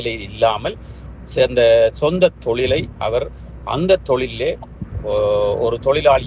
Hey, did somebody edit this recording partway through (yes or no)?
no